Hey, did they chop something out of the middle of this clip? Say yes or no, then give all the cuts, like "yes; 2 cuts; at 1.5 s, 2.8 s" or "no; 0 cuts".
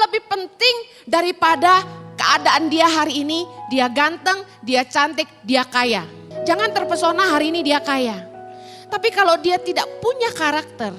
yes; 1 cut; at 6.2 s